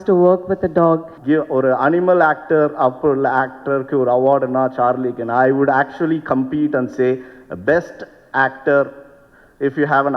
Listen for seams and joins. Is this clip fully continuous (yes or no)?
no